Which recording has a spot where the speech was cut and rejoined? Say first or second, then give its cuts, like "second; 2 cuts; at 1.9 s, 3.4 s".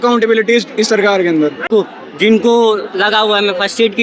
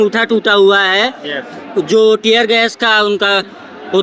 first; 1 cut; at 1.6 s